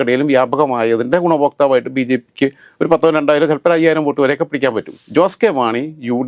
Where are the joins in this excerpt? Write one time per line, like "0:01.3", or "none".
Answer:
0:04.9